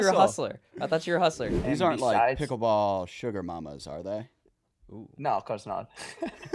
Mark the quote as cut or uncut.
cut